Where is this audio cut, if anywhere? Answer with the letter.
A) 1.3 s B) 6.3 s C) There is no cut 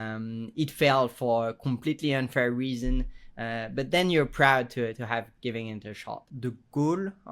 B